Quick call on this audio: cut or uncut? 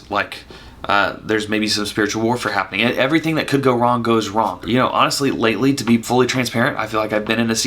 cut